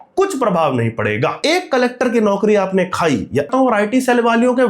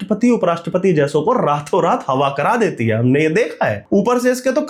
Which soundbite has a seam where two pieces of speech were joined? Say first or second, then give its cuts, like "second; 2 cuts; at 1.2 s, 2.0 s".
first; 2 cuts; at 1.4 s, 3.5 s